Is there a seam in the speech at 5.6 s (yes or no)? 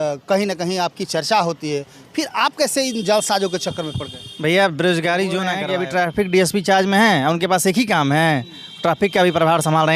yes